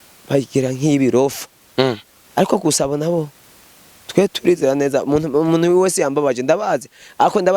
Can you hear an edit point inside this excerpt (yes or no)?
no